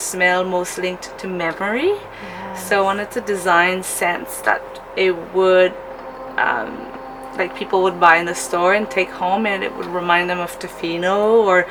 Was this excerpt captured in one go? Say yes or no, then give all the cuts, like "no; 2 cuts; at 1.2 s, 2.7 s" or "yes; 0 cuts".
yes; 0 cuts